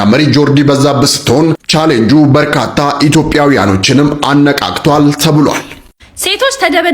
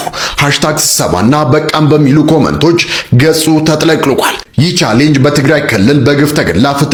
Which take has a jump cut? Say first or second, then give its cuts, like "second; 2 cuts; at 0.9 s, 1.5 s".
first; 1 cut; at 5.8 s